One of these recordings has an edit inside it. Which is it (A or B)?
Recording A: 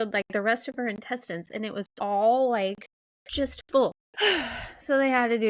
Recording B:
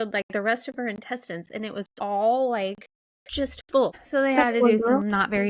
B